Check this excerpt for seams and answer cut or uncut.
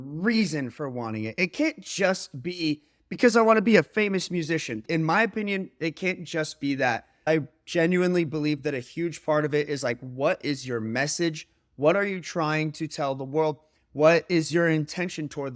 cut